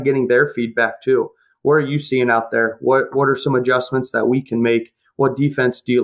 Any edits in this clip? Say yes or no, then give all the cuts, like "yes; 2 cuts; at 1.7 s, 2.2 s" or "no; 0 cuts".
no; 0 cuts